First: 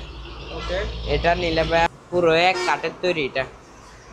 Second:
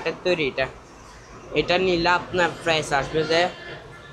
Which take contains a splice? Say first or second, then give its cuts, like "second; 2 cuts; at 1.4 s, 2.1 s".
first; 1 cut; at 1.9 s